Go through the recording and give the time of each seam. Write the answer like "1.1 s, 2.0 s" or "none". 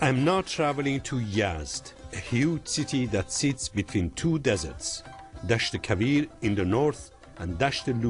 none